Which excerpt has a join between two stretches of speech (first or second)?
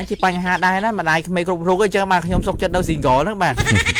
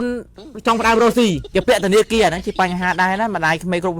second